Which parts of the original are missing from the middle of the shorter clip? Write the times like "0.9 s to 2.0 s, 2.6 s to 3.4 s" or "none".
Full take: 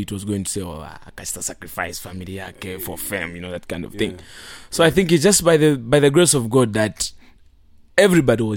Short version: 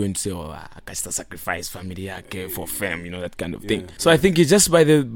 4.2 s to 4.6 s

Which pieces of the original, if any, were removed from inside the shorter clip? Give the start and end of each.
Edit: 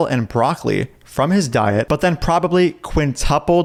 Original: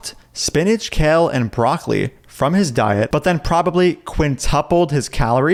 none

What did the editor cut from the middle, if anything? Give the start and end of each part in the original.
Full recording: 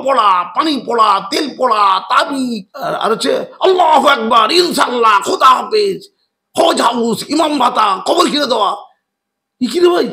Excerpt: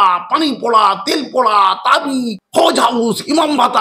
2.6 s to 6.4 s

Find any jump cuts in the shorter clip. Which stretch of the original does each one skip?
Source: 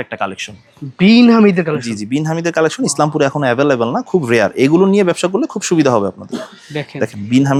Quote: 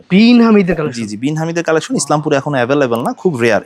none

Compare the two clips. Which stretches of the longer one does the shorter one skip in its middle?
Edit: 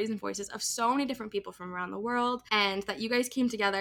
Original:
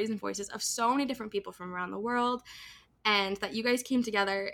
2.4 s to 3.0 s

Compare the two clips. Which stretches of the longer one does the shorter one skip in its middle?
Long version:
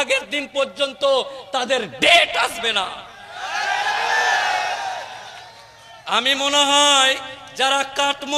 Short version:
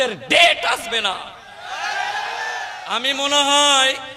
4.4 s to 5.9 s

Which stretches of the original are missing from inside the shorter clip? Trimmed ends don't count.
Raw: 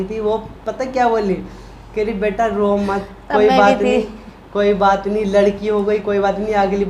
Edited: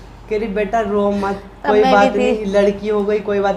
4.1 s to 5.2 s

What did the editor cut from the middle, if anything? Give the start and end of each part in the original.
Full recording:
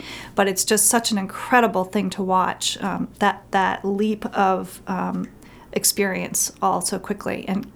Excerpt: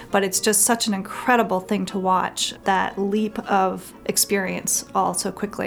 2.8 s to 3.4 s, 4.8 s to 5.6 s

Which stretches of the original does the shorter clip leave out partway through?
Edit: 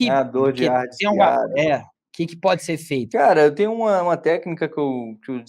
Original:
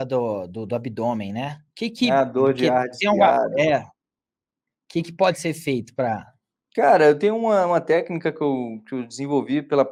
4.0 s to 4.7 s, 5.8 s to 6.7 s

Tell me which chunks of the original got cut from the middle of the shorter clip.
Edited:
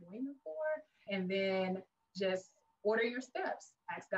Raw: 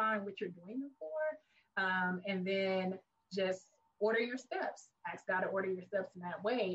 1.6 s to 2.2 s

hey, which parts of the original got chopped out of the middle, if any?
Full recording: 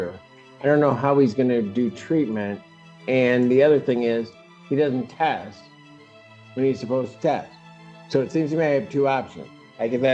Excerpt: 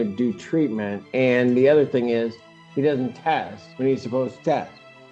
2.6 s to 2.9 s, 5.5 s to 6.4 s

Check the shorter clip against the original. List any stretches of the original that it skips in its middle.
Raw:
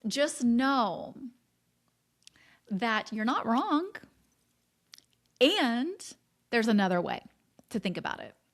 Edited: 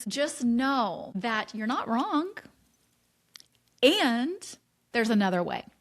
1.1 s to 2.7 s

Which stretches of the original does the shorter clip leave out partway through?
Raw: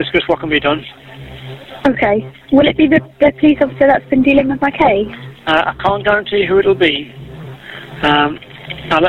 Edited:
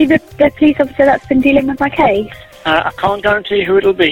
none

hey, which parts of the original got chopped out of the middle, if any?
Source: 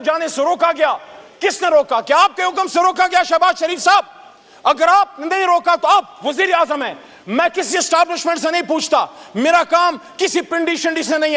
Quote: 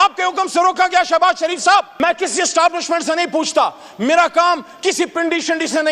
4.1 s to 7.3 s

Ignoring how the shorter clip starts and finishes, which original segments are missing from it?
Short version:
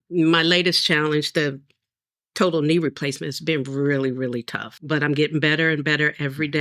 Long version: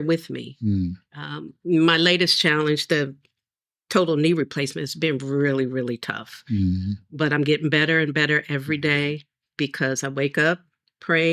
6.3 s to 7.0 s

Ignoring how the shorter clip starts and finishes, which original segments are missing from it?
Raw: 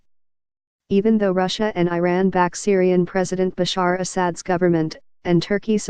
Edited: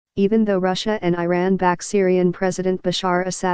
none

